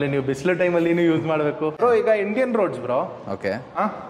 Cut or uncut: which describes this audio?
cut